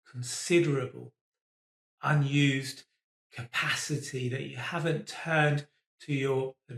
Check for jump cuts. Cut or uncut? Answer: uncut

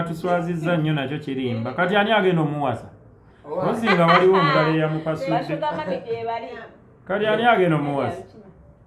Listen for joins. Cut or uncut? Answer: uncut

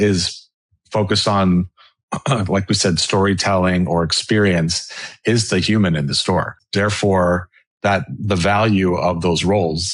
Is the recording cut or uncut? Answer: cut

